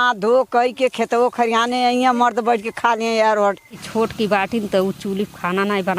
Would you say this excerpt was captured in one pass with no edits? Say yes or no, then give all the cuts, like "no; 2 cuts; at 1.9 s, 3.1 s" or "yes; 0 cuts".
no; 1 cut; at 3.9 s